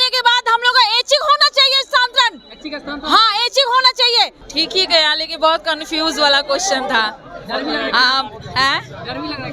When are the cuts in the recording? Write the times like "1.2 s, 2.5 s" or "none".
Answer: 4.4 s

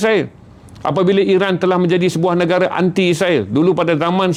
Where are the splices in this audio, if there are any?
none

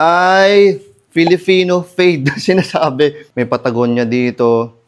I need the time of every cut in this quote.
3.2 s

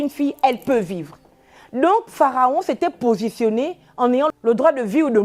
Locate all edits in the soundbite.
4.3 s

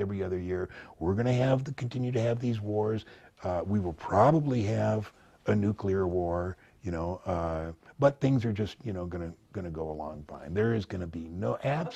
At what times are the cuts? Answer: none

